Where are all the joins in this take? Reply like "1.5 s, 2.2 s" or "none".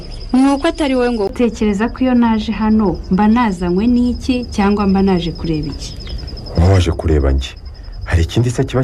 1.3 s